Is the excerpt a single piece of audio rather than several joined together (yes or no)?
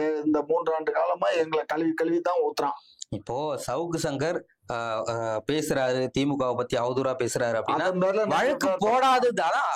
yes